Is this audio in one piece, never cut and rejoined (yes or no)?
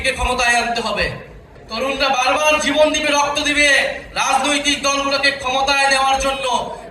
no